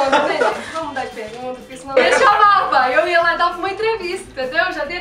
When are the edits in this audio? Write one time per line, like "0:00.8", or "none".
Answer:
0:02.0